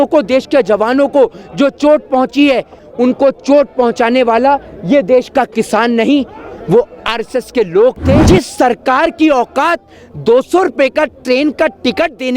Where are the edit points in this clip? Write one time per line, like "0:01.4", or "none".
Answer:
0:02.8
0:08.2